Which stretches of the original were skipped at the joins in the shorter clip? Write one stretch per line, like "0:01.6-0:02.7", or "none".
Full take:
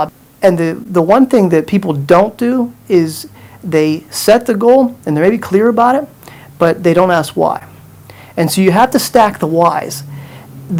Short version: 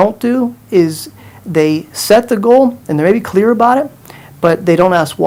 none